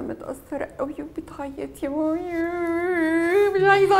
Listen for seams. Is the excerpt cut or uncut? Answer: uncut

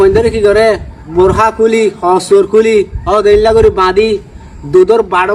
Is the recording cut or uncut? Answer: cut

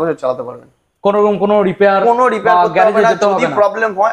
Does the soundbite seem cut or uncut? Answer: uncut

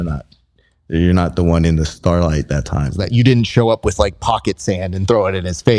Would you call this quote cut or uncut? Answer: cut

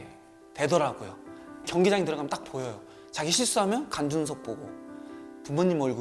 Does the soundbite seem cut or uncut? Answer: cut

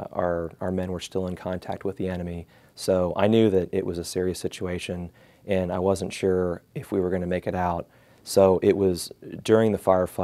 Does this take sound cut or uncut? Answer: uncut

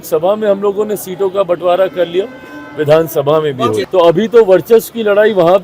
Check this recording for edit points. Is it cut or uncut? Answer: cut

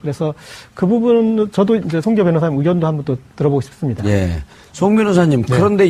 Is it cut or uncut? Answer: cut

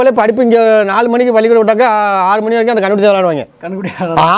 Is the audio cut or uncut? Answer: uncut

